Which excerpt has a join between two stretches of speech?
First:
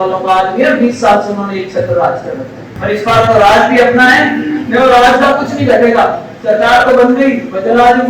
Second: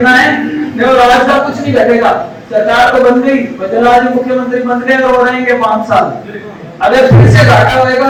first; 1 cut; at 2.7 s

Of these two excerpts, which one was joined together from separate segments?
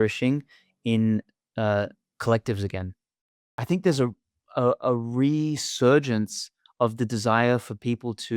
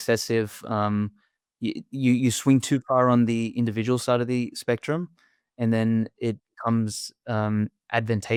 first; 1 cut; at 3.1 s

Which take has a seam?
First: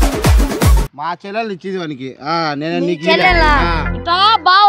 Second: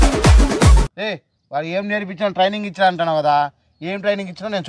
second; 1 cut; at 0.9 s

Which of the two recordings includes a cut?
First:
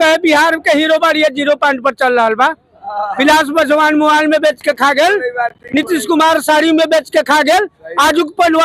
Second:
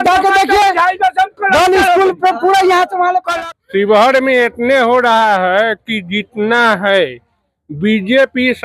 second; 1 cut; at 3.3 s

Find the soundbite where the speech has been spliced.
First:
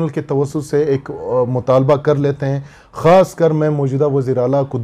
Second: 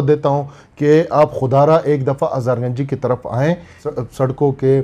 second; 1 cut; at 3.8 s

